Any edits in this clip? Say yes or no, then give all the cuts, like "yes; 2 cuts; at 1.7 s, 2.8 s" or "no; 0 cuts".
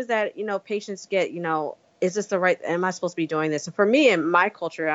yes; 1 cut; at 1.8 s